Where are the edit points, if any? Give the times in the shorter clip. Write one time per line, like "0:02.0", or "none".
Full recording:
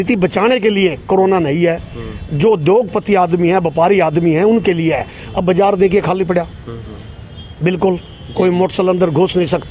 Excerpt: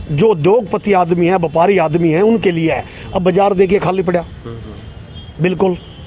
none